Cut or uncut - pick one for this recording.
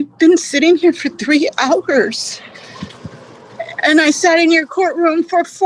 uncut